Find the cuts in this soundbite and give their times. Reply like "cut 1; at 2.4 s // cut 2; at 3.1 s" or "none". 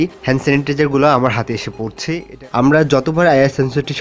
cut 1; at 2.3 s